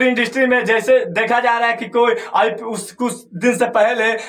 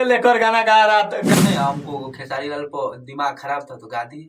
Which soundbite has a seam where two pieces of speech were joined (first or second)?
second